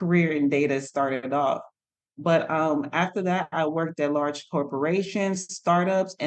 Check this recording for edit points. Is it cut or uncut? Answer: uncut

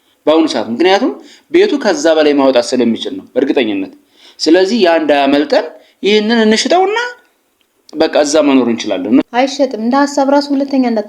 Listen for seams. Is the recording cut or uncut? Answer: cut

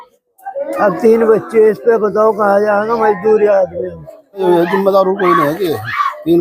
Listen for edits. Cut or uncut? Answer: cut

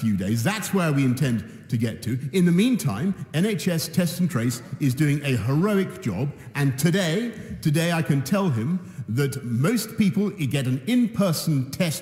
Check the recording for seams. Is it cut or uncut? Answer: cut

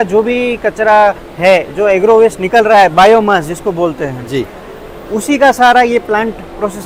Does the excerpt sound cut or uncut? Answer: uncut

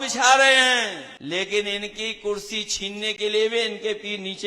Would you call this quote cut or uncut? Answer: cut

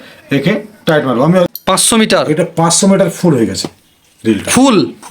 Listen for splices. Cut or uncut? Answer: cut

